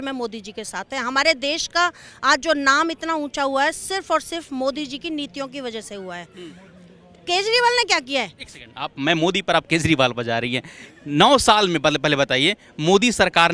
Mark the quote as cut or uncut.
uncut